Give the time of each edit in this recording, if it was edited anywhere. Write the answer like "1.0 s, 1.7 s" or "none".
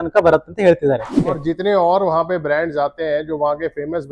1.4 s